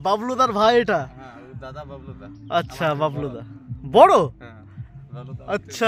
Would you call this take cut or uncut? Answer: uncut